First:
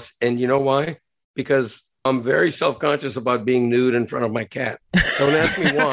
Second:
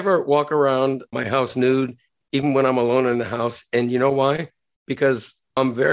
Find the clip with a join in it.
second; 1 cut; at 1.1 s

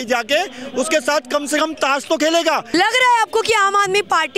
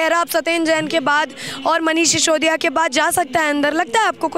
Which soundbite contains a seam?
first; 1 cut; at 2.6 s

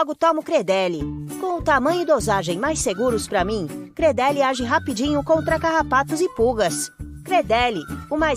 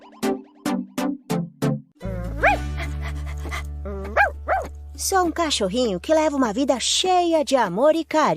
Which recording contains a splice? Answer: second; 1 cut; at 1.9 s

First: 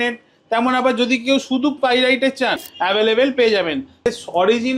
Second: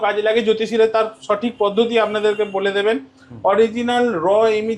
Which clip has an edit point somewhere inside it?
first; 2 cuts; at 2.7 s, 4.1 s

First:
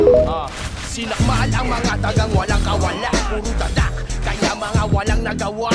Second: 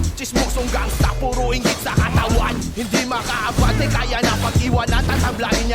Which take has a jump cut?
first; 1 cut; at 0.9 s

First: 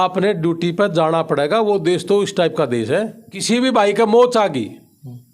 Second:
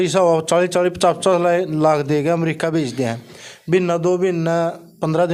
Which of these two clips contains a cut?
first; 1 cut; at 3.3 s

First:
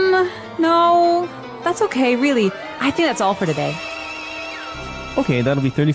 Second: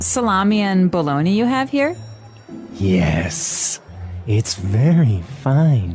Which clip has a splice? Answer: first; 1 cut; at 4.7 s

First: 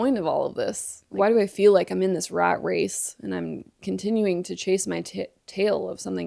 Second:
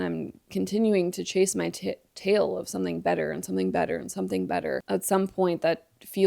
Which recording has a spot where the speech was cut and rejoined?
second; 1 cut; at 4.8 s

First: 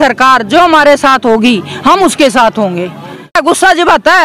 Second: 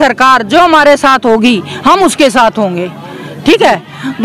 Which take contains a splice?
first; 1 cut; at 3.3 s

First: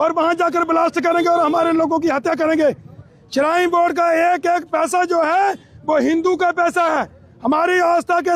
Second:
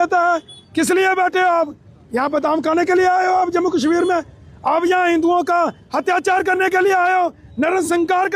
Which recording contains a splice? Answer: first; 1 cut; at 3.0 s

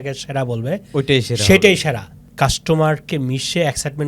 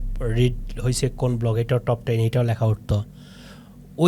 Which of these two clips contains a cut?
first; 1 cut; at 2.2 s

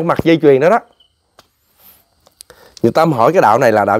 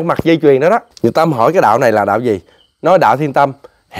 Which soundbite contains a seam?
second; 1 cut; at 0.9 s

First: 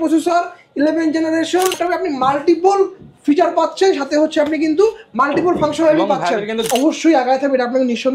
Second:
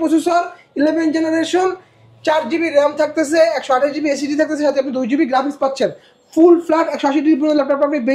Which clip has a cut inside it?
first; 2 cuts; at 1.8 s, 6.7 s

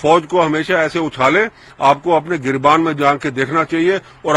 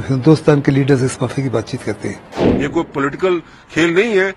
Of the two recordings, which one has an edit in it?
second; 1 cut; at 2.4 s

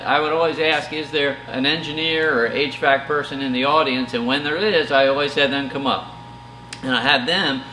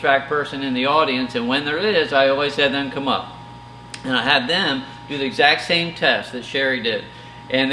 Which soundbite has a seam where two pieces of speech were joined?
first; 1 cut; at 1.5 s

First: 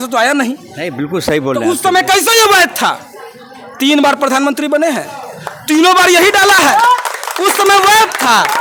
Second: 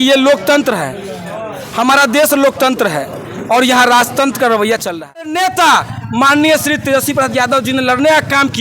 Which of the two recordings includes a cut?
second; 1 cut; at 5.3 s

